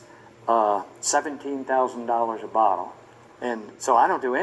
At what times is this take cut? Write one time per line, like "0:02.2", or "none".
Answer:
0:02.4

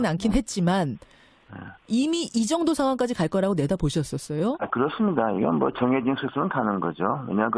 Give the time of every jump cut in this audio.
none

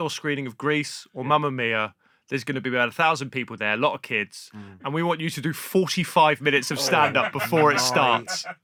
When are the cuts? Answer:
none

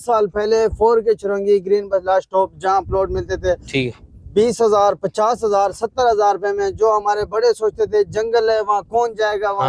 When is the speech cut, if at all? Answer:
none

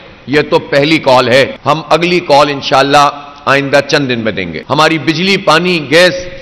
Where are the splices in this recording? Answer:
0:01.6
0:04.5

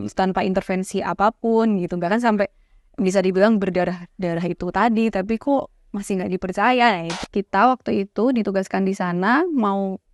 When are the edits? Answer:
0:07.2

